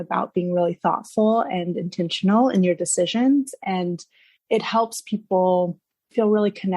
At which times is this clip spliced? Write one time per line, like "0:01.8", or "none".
0:04.4